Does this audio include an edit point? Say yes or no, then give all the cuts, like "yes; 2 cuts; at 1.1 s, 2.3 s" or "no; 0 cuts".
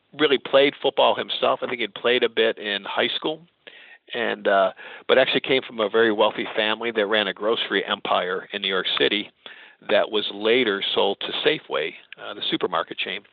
no; 0 cuts